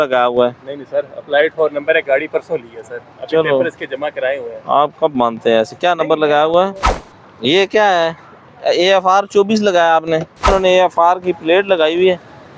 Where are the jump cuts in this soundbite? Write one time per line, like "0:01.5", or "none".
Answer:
0:06.8
0:10.5